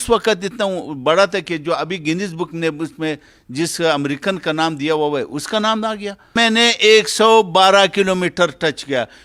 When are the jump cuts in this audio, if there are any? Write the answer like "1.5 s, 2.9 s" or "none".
6.4 s

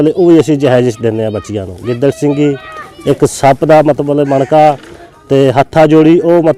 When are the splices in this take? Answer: none

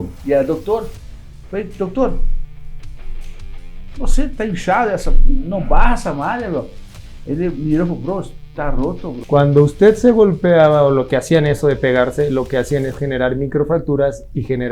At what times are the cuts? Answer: 9.1 s

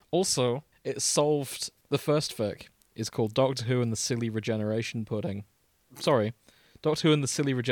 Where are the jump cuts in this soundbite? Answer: 1.7 s

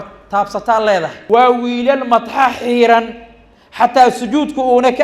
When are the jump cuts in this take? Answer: 1.2 s

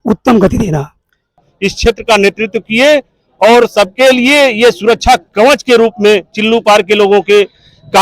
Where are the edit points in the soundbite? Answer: 1.4 s

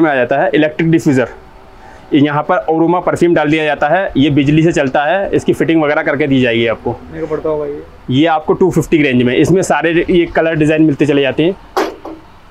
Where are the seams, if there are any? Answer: none

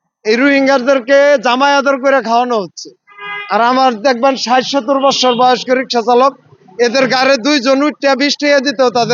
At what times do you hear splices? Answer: none

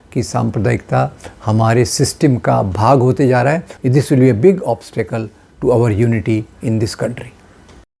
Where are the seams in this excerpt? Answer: 3.7 s

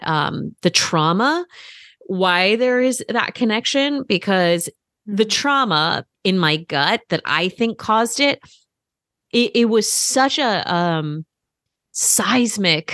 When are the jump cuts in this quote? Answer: 6.1 s

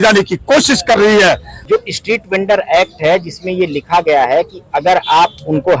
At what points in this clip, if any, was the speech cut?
1.5 s

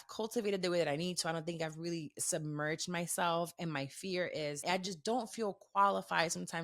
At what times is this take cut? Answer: 4.6 s

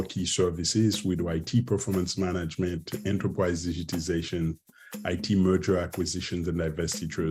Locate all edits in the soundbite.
none

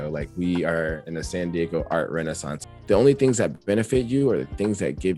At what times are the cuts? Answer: 2.7 s

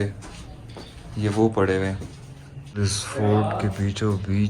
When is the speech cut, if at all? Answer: 2.8 s

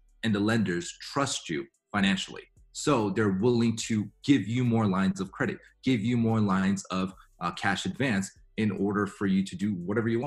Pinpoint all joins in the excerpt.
none

